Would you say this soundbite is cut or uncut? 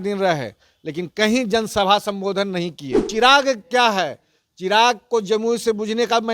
cut